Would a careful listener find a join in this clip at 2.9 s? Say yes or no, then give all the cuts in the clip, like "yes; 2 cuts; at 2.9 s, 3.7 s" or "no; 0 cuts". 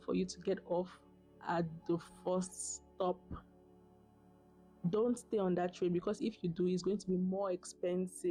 no; 0 cuts